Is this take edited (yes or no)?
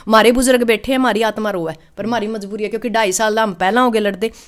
no